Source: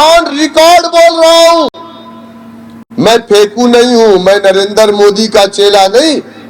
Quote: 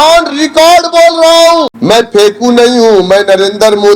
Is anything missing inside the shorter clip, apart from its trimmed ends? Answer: yes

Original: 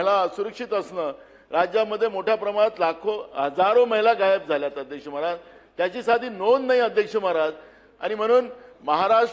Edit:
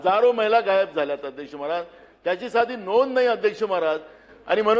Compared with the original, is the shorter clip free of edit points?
yes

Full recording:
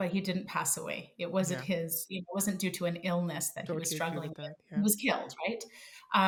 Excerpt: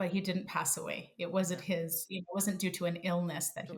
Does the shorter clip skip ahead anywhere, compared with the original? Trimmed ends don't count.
no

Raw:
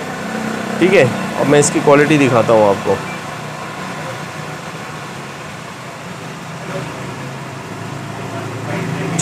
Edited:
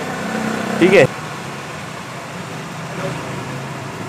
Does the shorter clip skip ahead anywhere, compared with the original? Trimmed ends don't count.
yes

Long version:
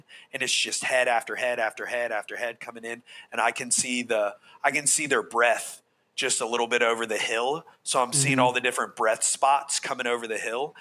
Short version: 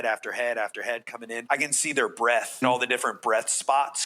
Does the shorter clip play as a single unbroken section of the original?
no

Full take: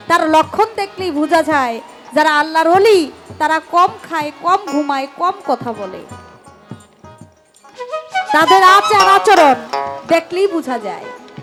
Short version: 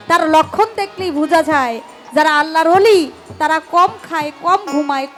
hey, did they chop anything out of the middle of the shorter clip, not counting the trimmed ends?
no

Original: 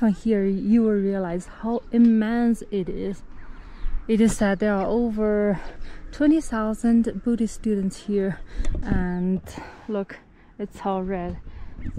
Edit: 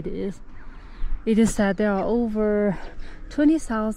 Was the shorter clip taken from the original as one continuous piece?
yes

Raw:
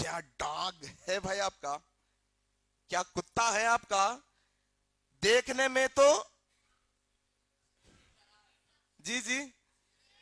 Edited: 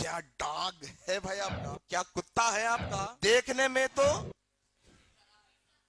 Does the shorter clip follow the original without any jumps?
no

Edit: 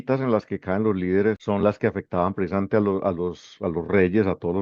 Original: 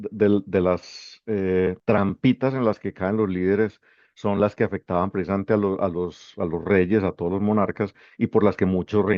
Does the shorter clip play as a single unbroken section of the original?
no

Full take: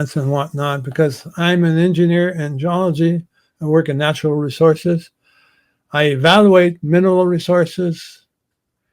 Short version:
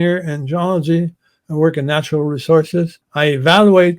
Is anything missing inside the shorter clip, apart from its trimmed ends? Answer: yes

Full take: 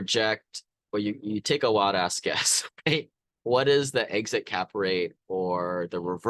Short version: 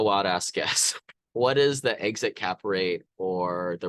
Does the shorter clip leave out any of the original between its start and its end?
yes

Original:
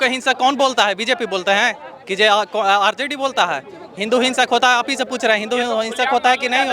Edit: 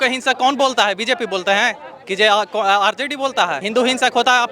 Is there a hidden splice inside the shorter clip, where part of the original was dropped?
yes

